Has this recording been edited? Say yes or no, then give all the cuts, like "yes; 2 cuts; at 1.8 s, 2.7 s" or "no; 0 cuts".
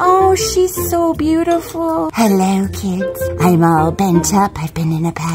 yes; 1 cut; at 2.1 s